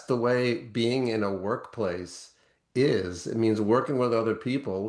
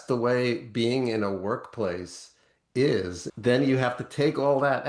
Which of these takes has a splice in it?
second; 1 cut; at 3.2 s

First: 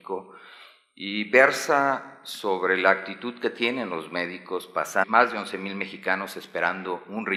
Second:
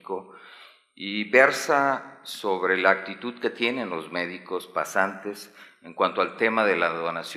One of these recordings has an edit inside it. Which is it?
second; 1 cut; at 5.0 s

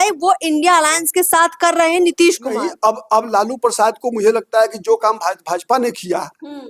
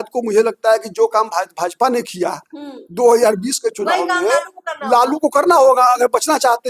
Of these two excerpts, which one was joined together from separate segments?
first; 1 cut; at 2.6 s

